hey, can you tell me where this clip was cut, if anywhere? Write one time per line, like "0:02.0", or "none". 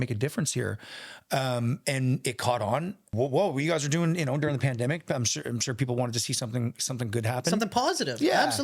0:03.0

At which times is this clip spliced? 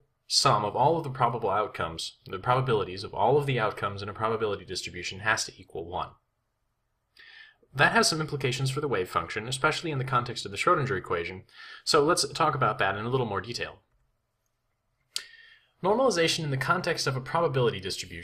0:14.6

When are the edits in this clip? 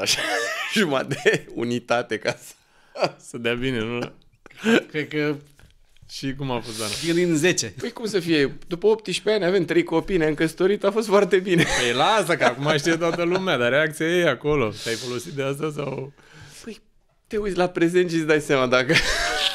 none

